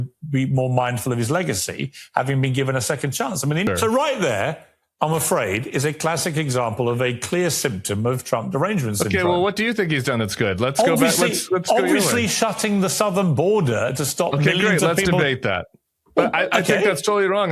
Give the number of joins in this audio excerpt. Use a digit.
1